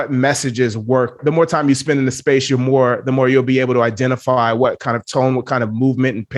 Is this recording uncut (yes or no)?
no